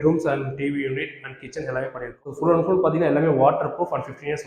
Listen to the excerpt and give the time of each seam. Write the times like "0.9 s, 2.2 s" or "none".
2.4 s